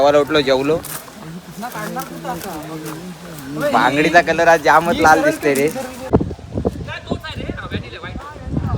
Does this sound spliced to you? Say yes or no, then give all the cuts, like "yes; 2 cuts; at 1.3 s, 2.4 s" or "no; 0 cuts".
yes; 1 cut; at 6.0 s